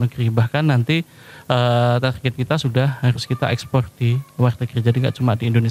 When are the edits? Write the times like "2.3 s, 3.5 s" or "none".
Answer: none